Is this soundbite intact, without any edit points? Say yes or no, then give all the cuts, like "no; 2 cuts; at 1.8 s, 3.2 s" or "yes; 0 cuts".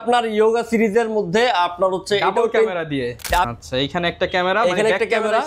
no; 1 cut; at 3.5 s